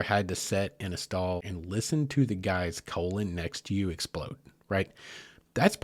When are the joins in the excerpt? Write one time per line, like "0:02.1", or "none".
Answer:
0:01.4